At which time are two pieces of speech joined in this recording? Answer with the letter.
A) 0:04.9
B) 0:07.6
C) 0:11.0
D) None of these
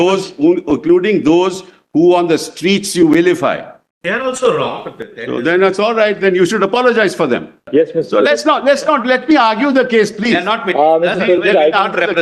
B